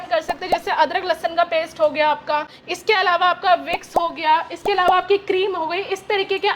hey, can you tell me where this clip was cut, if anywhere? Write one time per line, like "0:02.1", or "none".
none